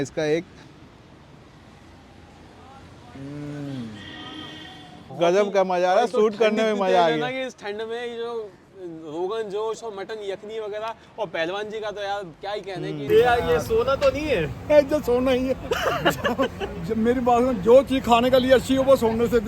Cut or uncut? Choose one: cut